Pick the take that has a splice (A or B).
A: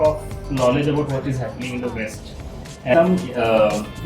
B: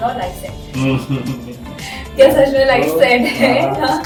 A